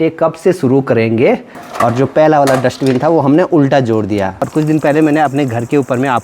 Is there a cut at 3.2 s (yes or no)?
no